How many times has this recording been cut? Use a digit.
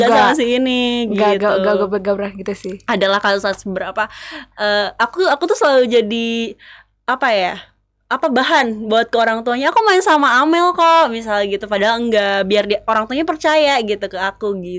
0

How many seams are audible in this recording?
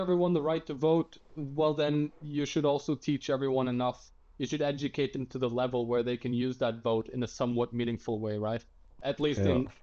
0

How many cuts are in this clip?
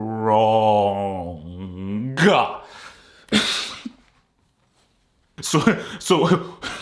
1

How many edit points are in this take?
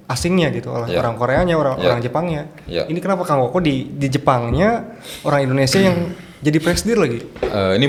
0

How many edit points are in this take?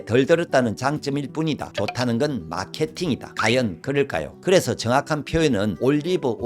1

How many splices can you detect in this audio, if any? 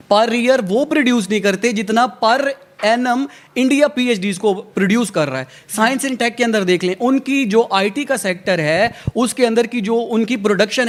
0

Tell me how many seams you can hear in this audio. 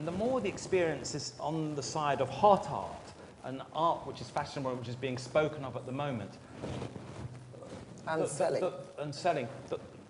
1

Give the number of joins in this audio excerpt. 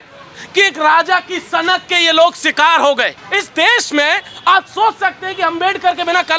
1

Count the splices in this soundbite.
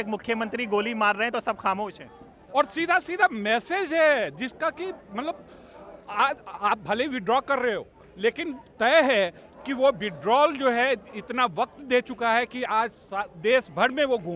0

